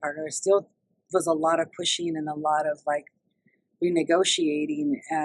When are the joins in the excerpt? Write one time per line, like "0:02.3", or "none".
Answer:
none